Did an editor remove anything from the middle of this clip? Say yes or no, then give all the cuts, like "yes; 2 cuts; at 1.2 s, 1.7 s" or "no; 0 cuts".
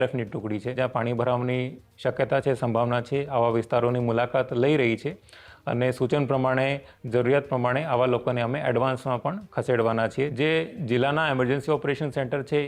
yes; 2 cuts; at 0.8 s, 10.3 s